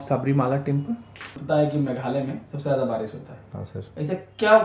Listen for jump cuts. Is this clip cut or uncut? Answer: cut